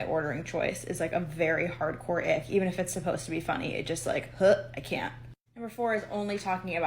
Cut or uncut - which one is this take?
cut